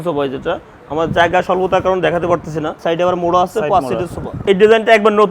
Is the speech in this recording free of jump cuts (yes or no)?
no